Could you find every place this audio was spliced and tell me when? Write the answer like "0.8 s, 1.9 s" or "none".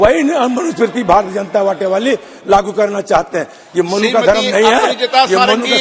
none